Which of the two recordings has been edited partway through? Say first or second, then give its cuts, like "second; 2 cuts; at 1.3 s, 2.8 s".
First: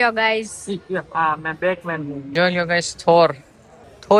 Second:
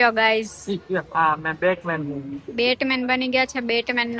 first; 1 cut; at 2.2 s